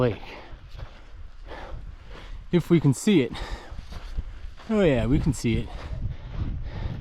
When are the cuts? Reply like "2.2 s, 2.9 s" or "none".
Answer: 5.9 s